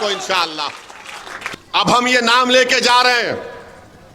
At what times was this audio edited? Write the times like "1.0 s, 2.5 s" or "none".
1.3 s